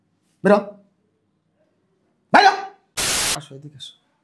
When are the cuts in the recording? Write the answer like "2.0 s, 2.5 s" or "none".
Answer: 3.3 s